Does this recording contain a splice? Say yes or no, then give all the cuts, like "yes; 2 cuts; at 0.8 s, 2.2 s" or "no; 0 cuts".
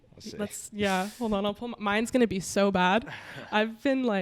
no; 0 cuts